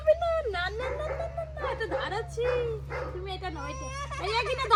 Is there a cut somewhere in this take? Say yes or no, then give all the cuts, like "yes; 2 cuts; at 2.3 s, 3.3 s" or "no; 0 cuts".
no; 0 cuts